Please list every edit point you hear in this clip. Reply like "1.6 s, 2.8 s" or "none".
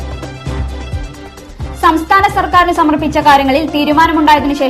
1.0 s